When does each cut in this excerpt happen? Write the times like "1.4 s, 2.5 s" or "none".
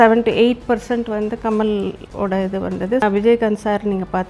2.0 s, 3.0 s